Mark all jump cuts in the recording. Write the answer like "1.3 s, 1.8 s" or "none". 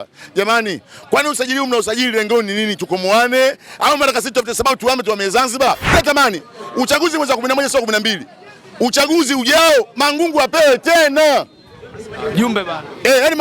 5.9 s

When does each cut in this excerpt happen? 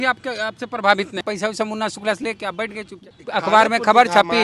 1.2 s, 3.0 s

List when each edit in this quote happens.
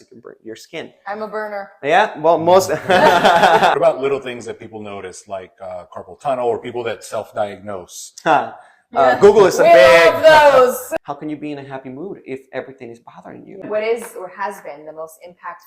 3.7 s, 10.8 s, 13.6 s

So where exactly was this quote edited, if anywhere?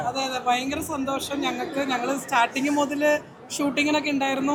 none

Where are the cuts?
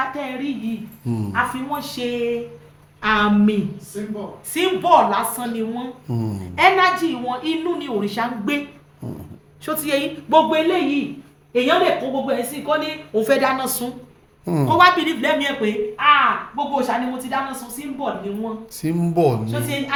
none

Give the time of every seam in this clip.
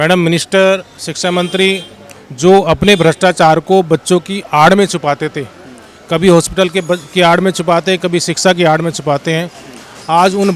none

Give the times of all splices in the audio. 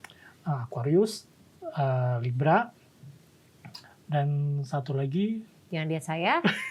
none

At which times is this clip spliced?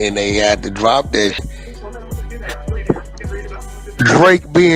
1.4 s

